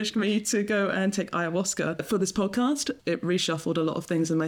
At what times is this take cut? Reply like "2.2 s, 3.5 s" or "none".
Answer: 2.0 s, 3.0 s

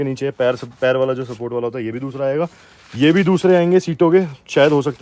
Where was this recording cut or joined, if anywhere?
none

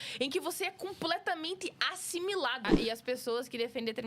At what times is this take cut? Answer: 2.7 s

